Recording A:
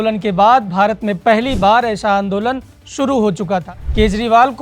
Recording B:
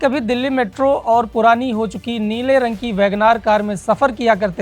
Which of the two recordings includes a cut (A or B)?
A